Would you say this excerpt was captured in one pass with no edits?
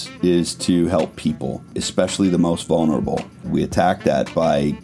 no; 2 cuts; at 1.8 s, 3.5 s

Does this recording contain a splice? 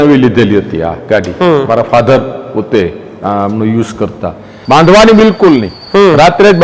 yes; 1 cut; at 4.5 s

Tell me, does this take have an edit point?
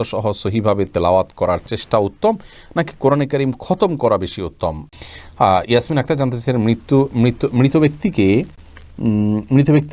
yes; 1 cut; at 4.9 s

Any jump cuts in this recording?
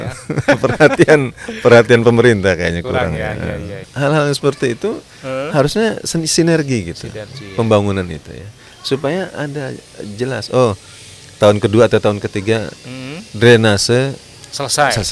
yes; 1 cut; at 3.8 s

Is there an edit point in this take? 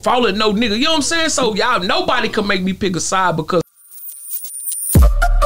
yes; 1 cut; at 3.8 s

